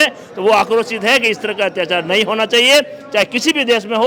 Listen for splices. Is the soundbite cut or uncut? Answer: uncut